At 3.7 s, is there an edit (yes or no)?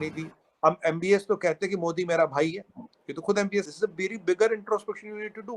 yes